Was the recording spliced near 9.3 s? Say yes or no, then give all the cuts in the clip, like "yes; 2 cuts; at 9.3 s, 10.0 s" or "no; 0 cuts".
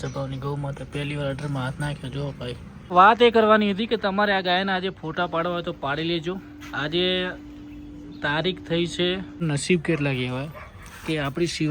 yes; 2 cuts; at 2.9 s, 9.3 s